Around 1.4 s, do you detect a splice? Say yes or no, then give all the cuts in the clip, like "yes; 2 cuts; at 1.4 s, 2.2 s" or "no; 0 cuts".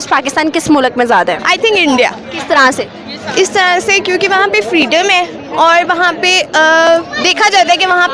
yes; 1 cut; at 1.4 s